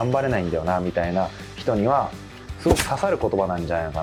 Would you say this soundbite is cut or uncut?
uncut